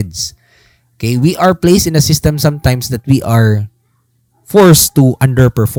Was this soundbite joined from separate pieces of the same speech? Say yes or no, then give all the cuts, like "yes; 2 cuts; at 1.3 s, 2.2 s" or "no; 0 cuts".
no; 0 cuts